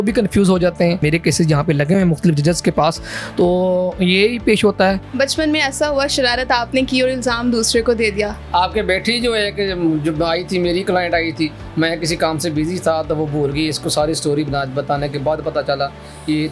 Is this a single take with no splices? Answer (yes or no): no